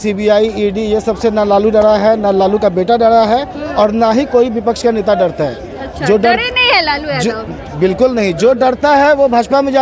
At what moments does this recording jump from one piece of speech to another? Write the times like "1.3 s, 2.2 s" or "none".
none